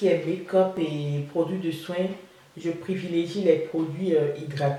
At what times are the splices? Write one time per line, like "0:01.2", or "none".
none